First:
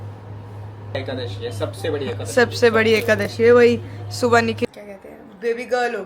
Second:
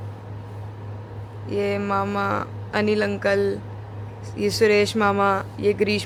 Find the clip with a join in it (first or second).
first